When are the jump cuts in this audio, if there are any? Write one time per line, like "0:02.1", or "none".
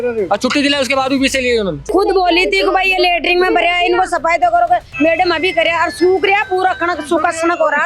0:01.8